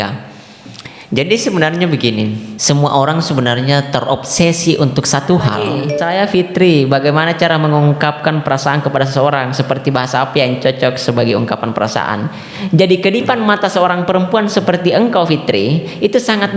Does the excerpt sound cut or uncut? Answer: cut